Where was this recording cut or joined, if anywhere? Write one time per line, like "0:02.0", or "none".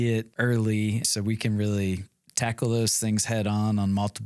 0:01.1

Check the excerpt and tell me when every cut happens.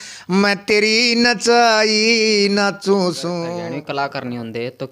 0:03.5

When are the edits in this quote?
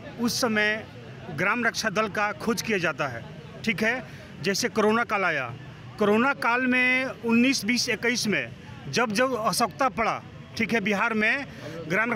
none

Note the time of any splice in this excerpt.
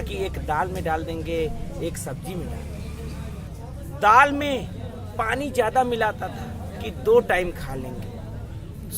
0:03.5

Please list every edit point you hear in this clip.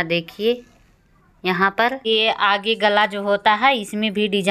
0:02.0

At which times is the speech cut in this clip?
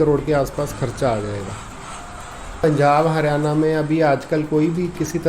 0:02.6

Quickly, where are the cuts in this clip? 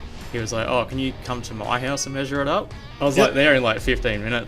0:02.9

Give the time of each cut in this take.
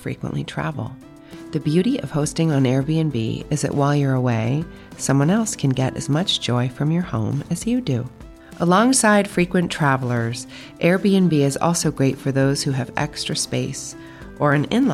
none

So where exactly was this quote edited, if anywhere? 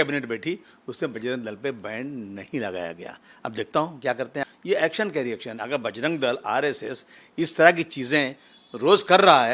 0:04.4

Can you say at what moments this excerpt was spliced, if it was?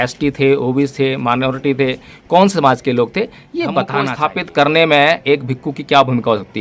0:04.1

